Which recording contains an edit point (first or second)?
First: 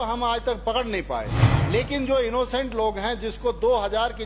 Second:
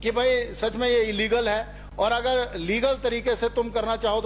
first